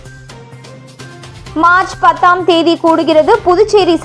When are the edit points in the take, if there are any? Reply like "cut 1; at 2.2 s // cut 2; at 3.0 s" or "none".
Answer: cut 1; at 1.3 s